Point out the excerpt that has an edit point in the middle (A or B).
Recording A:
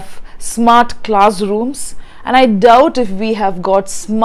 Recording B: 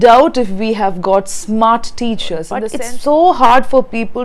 B